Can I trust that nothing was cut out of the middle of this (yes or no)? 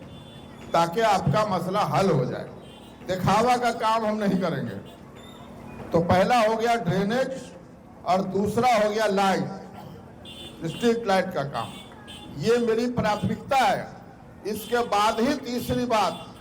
yes